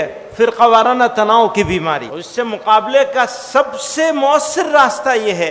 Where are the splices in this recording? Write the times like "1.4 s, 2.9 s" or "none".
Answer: 2.2 s